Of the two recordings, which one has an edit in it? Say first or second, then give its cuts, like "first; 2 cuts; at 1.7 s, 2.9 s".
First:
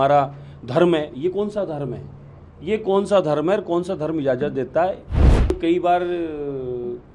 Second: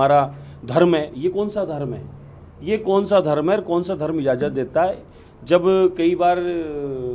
first; 1 cut; at 5.5 s